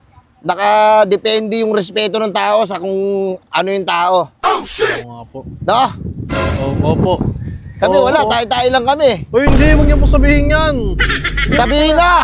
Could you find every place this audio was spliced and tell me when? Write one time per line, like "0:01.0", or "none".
none